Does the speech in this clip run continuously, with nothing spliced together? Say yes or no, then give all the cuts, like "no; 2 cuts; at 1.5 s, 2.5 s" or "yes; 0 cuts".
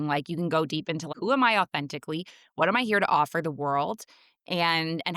no; 1 cut; at 1.1 s